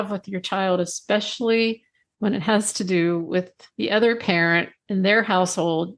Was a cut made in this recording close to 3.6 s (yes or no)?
yes